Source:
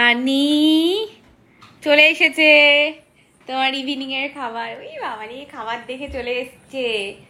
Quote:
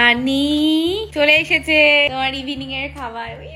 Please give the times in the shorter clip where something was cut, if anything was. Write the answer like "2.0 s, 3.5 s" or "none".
1.1 s, 2.1 s